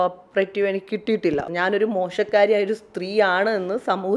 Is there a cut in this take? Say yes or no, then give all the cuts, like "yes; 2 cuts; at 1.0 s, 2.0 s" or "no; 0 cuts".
yes; 1 cut; at 1.4 s